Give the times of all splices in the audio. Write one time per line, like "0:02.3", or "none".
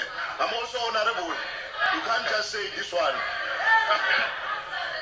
none

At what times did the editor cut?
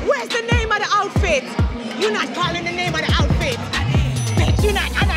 none

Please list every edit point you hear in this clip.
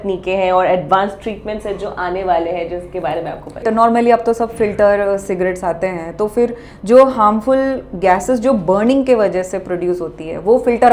0:03.6

